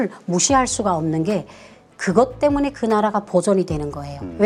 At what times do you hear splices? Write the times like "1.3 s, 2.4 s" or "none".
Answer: none